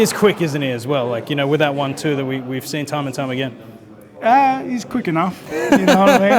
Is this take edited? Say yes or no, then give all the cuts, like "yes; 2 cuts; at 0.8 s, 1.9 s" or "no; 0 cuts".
no; 0 cuts